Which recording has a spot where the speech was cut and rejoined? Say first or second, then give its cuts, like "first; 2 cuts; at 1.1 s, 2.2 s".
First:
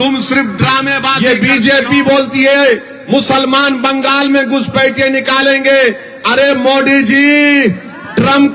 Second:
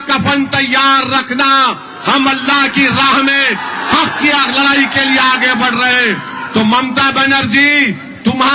first; 1 cut; at 1.2 s